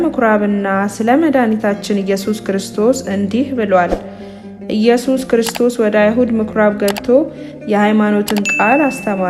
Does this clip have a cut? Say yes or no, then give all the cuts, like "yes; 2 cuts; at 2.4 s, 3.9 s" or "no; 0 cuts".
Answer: no; 0 cuts